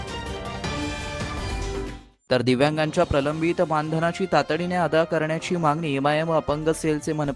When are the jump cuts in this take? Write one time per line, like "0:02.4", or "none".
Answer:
0:02.0